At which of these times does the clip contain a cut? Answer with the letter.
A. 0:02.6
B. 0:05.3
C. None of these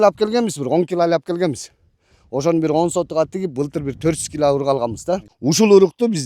B